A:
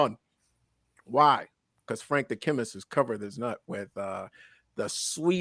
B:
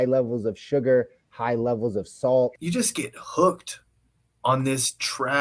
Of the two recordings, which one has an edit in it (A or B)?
B